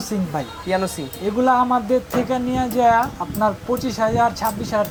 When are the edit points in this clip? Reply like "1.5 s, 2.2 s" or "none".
none